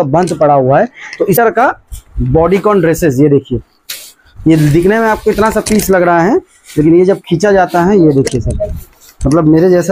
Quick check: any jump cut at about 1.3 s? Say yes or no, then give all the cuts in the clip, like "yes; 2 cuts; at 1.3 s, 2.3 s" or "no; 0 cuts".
yes; 1 cut; at 1.3 s